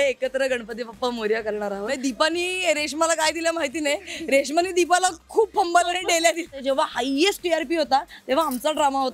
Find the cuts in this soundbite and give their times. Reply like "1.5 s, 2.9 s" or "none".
1.9 s, 6.6 s

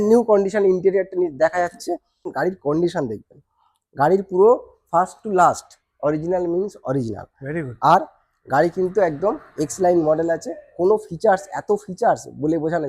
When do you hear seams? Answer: 2.3 s

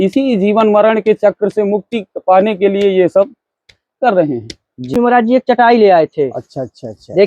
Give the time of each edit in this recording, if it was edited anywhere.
4.9 s

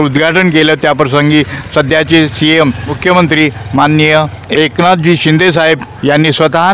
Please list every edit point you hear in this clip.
2.9 s, 4.4 s, 5.9 s

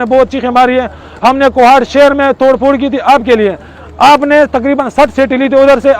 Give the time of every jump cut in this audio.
none

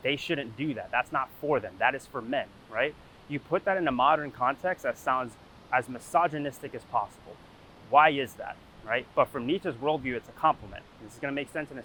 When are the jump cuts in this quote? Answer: none

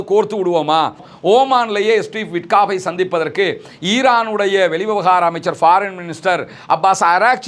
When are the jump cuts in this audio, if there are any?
1.1 s

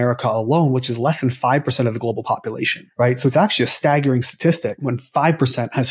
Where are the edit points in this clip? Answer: 2.8 s, 5.0 s

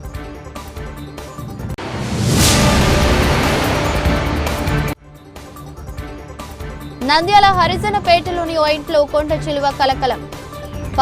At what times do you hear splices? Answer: none

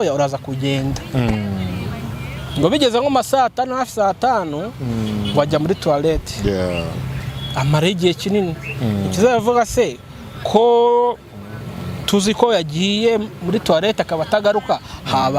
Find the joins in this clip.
none

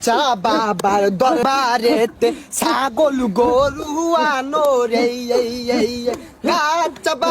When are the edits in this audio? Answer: 1.4 s

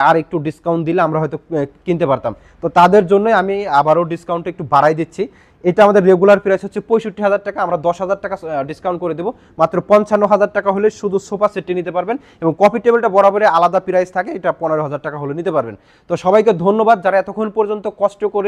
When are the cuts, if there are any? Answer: none

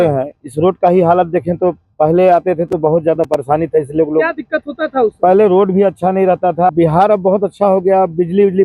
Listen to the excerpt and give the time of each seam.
6.7 s

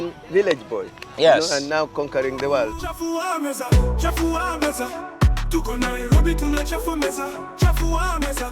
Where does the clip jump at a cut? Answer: 2.7 s

